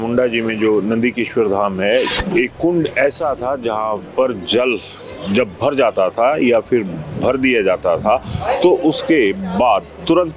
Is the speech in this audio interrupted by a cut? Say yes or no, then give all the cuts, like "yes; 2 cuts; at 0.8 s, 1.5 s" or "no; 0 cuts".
yes; 1 cut; at 2.1 s